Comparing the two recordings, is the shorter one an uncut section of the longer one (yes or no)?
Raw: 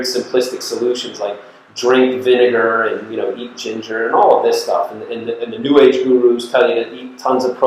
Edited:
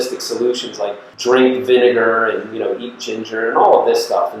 no